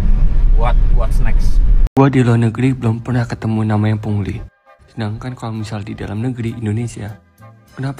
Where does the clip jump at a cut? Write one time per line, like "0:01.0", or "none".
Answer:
0:01.8